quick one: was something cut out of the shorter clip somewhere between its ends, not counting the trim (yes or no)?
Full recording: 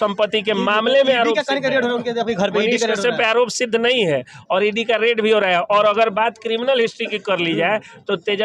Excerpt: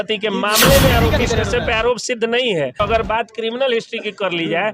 yes